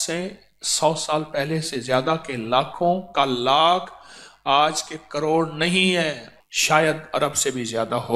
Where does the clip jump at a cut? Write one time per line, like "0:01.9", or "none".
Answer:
0:06.3